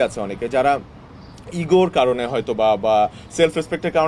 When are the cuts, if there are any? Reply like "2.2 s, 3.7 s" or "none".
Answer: none